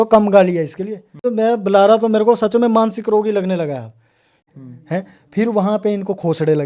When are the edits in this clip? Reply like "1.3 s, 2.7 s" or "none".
1.3 s, 4.4 s

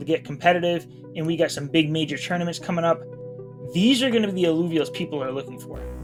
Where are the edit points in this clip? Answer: none

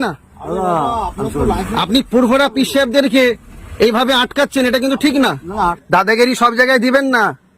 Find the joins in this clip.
5.7 s

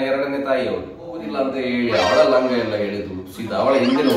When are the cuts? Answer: 1.3 s

